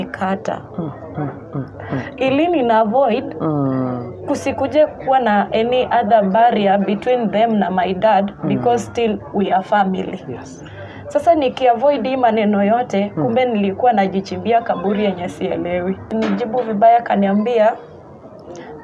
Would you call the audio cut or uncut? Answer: cut